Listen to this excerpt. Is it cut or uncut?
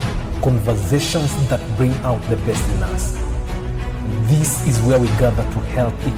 uncut